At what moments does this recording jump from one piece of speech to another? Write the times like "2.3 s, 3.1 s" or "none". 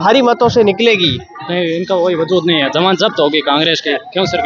none